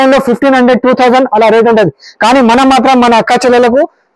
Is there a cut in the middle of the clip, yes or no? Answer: no